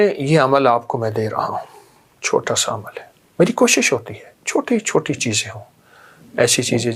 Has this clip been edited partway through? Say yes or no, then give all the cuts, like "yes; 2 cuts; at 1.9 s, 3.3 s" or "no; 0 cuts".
no; 0 cuts